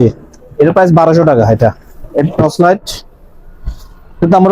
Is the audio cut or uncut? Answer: cut